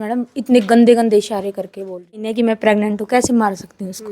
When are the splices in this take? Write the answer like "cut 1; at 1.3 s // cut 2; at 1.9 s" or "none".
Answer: cut 1; at 2.3 s